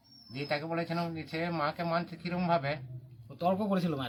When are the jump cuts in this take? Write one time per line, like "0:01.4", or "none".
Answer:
none